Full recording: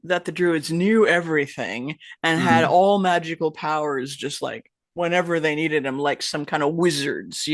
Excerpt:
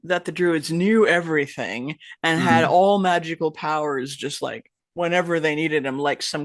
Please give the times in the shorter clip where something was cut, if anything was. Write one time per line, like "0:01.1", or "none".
none